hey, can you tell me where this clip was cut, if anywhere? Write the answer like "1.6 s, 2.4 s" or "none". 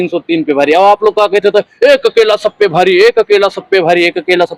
none